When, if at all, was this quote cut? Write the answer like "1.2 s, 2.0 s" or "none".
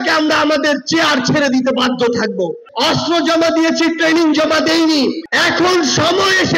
2.6 s, 5.3 s